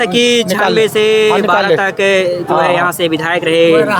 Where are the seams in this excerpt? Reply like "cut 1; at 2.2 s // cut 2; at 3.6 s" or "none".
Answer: none

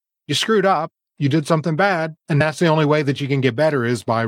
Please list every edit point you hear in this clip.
cut 1; at 2.4 s

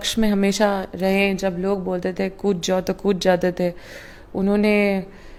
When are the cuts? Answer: none

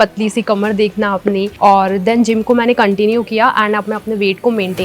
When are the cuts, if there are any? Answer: cut 1; at 1.5 s

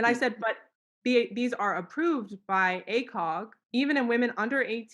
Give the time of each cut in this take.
cut 1; at 3.6 s

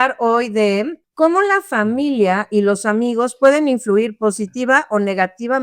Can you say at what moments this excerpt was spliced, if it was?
cut 1; at 1.0 s

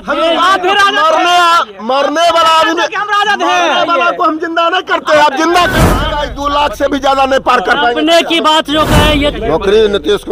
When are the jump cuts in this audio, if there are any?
cut 1; at 6.1 s // cut 2; at 9.4 s

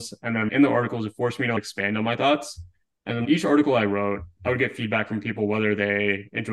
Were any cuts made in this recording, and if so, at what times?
none

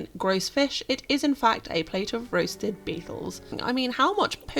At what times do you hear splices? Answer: cut 1; at 3.6 s

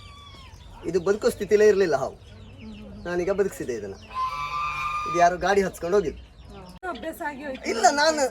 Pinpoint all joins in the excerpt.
cut 1; at 6.8 s

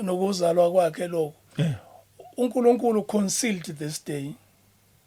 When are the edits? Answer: none

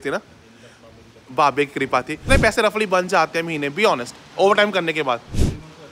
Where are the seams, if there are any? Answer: cut 1; at 2.2 s

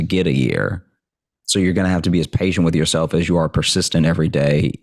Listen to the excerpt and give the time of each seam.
none

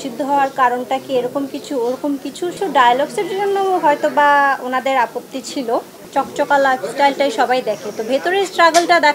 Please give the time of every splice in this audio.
cut 1; at 2.5 s // cut 2; at 6.0 s

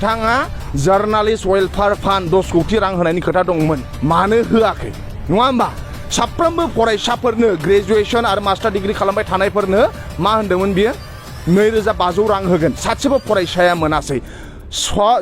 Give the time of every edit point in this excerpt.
cut 1; at 3.9 s

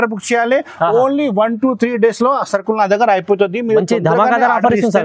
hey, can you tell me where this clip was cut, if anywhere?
none

